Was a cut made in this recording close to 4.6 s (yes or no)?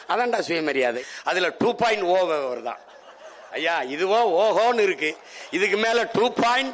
no